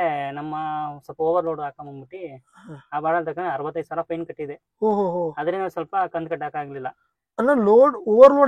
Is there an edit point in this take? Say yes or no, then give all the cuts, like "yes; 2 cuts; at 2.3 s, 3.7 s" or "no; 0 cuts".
no; 0 cuts